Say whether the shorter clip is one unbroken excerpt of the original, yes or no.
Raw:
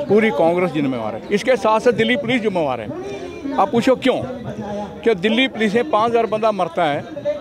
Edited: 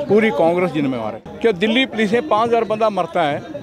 no